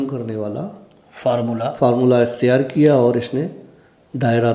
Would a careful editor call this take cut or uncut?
uncut